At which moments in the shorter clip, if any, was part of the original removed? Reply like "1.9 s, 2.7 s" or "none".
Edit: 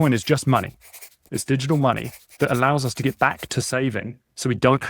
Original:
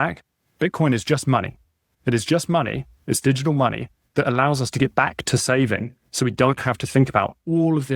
1.1 s